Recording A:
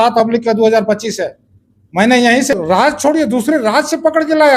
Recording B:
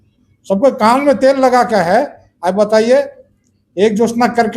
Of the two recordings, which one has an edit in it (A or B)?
A